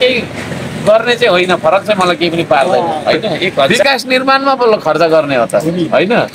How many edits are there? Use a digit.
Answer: 1